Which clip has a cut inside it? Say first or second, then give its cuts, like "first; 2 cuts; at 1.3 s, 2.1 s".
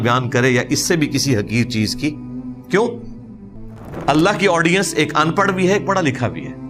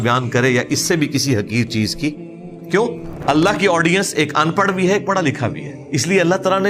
second; 2 cuts; at 3.1 s, 5.7 s